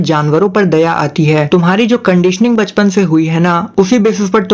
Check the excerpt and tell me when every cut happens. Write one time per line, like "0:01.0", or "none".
0:01.5